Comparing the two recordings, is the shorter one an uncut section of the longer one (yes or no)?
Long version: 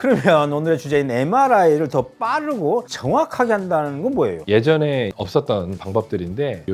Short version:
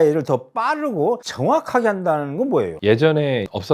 yes